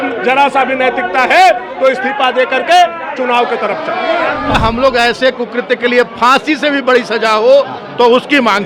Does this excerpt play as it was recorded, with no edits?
no; 1 cut; at 4.6 s

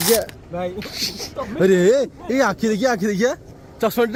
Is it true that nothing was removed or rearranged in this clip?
yes; 0 cuts

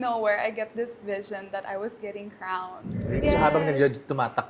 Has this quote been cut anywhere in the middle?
yes; 1 cut; at 3.2 s

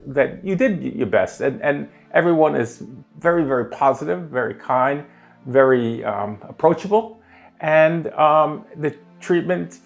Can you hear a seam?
no; 0 cuts

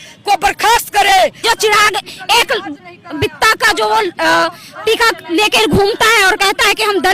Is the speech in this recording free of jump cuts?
no; 1 cut; at 1.4 s

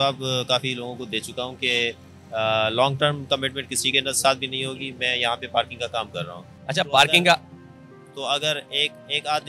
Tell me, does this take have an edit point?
no; 0 cuts

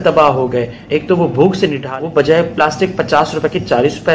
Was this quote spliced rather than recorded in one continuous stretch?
yes; 1 cut; at 1.8 s

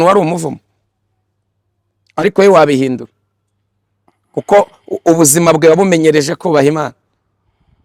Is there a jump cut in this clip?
no; 0 cuts

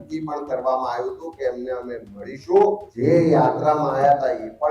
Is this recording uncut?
no; 1 cut; at 2.9 s

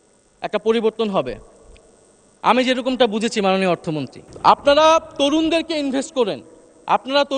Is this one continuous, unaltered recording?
no; 1 cut; at 4.2 s

